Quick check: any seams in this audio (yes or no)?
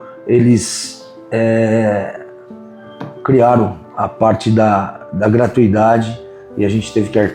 no